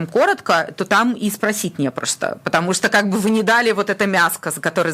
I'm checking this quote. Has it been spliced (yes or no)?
no